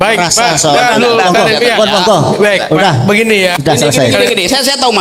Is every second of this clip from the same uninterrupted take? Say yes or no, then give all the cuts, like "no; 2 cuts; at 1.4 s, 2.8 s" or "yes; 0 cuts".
yes; 0 cuts